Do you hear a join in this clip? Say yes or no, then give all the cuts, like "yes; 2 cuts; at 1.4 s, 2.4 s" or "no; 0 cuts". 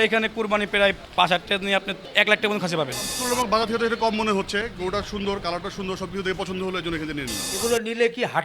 yes; 4 cuts; at 1.0 s, 2.0 s, 3.1 s, 7.4 s